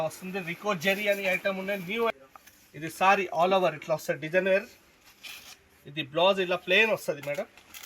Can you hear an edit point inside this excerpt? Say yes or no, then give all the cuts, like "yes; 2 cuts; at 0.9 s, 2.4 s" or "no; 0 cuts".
yes; 1 cut; at 2.1 s